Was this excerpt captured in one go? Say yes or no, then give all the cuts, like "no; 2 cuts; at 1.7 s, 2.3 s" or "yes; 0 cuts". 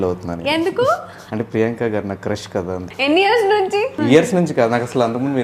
no; 3 cuts; at 1.2 s, 2.9 s, 4.0 s